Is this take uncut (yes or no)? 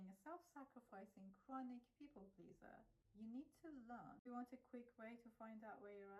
no